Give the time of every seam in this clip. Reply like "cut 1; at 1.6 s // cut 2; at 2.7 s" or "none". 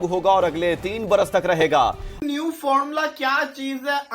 cut 1; at 2.1 s